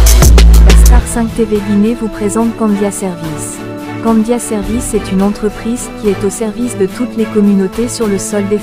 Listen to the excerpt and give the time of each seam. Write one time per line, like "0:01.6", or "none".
0:00.9